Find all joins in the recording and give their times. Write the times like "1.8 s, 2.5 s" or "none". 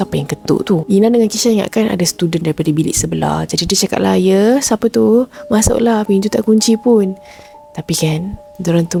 none